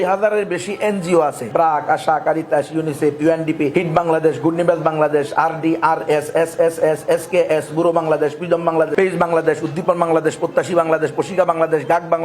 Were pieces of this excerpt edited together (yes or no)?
yes